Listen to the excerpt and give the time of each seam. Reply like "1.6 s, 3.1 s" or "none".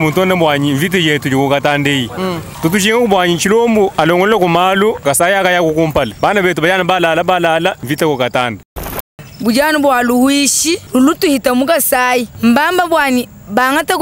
2.5 s, 3.9 s, 5.0 s, 6.1 s, 7.8 s, 9.1 s, 10.8 s, 12.3 s